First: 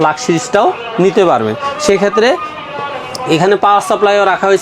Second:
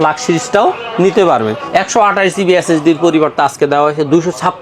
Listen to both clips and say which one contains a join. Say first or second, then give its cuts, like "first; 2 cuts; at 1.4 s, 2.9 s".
second; 1 cut; at 1.6 s